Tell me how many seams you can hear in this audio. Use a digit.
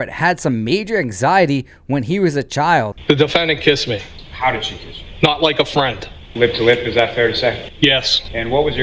1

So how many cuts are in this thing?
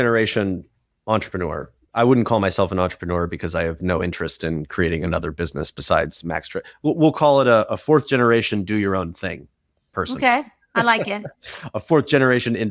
1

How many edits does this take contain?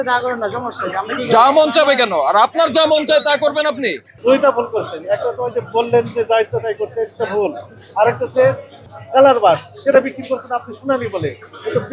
2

